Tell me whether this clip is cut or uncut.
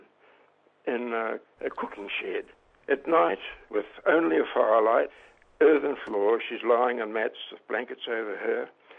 cut